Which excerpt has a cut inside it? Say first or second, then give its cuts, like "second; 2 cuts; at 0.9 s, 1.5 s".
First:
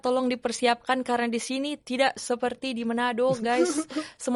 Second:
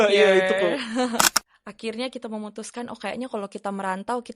second; 1 cut; at 1.4 s